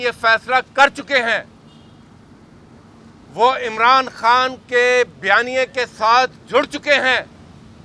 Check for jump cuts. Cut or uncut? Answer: uncut